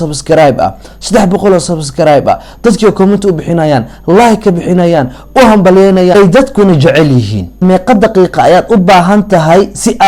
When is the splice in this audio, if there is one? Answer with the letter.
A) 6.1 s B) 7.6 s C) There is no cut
B